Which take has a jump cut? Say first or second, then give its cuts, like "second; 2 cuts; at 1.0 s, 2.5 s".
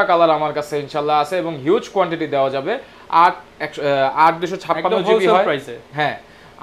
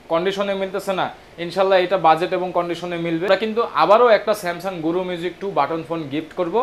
second; 1 cut; at 3.3 s